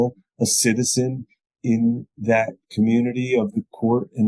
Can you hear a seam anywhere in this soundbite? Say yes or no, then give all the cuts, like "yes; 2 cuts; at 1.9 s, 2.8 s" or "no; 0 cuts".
no; 0 cuts